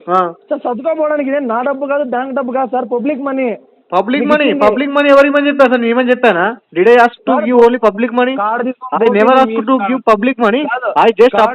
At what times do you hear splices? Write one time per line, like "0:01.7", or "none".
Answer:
none